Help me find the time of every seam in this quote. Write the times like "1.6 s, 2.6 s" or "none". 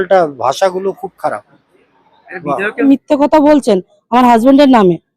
2.9 s